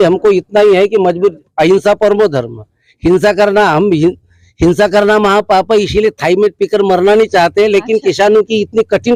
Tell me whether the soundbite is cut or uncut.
uncut